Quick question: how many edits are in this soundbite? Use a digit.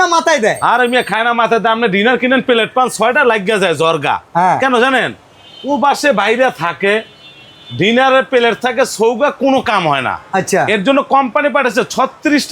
0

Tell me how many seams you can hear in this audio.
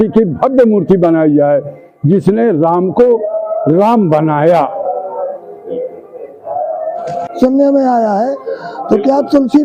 1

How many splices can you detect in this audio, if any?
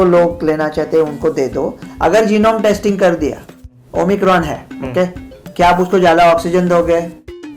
1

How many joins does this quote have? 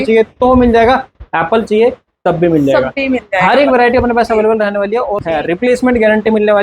1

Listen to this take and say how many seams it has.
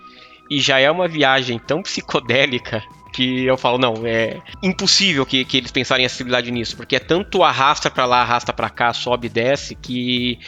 1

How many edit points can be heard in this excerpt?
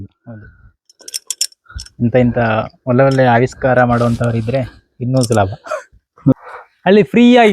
1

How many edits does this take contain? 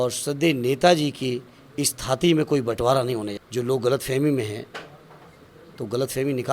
1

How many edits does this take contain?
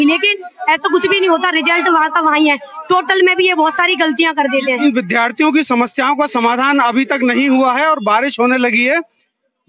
1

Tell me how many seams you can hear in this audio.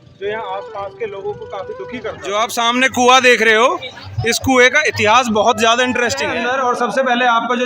2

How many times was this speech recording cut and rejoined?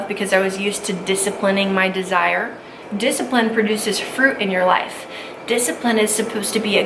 1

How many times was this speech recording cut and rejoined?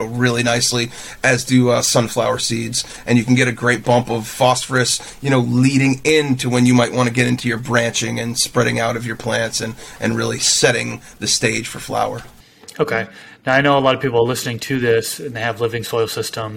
0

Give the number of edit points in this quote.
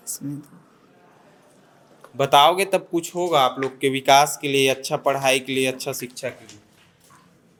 0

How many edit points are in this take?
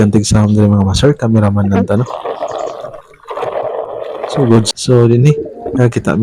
1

